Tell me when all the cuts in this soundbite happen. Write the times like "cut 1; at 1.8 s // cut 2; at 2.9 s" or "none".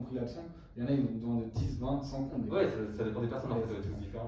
none